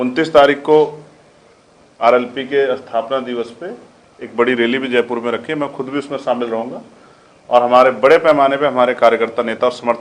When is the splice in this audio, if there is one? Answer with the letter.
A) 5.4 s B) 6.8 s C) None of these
C